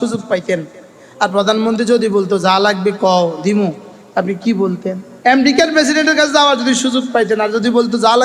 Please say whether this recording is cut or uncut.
cut